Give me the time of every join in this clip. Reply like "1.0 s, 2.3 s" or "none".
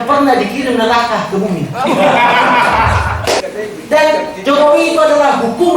3.4 s